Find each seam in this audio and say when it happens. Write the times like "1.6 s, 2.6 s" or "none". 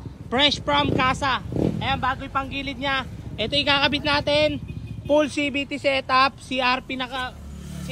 none